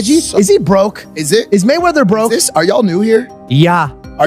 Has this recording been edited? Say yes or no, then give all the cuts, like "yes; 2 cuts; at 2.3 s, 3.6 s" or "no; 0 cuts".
no; 0 cuts